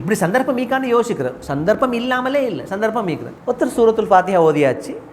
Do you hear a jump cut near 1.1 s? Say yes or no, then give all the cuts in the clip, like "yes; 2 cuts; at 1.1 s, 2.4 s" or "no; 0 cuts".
no; 1 cut; at 3.3 s